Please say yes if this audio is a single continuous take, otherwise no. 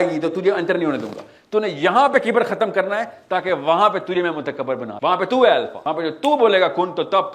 no